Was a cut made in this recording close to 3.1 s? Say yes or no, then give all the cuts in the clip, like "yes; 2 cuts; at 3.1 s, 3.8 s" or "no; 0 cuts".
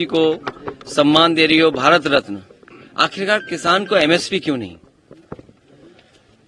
no; 0 cuts